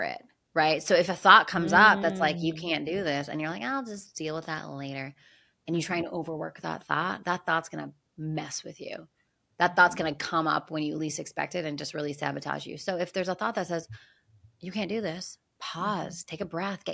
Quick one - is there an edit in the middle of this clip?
yes; 1 cut; at 1.1 s

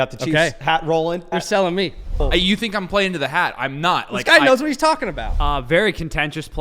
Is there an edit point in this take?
yes; 3 cuts; at 1.3 s, 2.2 s, 5.3 s

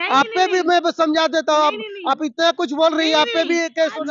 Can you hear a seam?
no; 0 cuts

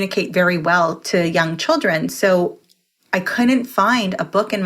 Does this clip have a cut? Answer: yes; 1 cut; at 1.0 s

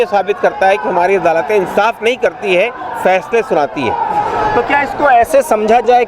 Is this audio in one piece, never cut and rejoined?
yes; 0 cuts

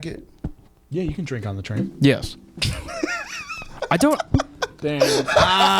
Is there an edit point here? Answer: no; 0 cuts

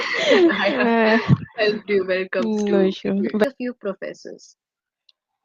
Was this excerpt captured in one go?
no; 1 cut; at 3.4 s

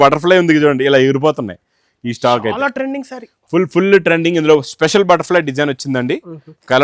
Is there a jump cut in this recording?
no; 0 cuts

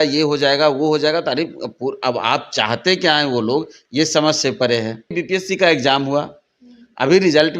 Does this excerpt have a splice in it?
yes; 1 cut; at 5.2 s

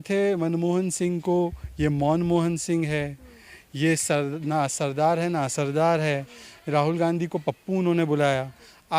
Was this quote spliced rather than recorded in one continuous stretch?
no; 0 cuts

